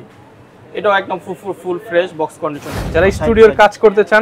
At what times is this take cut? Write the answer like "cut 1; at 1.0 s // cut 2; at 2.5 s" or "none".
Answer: cut 1; at 2.8 s